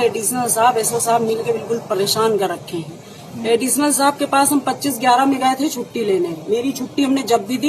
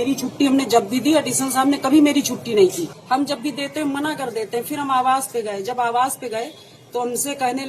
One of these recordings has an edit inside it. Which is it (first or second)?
second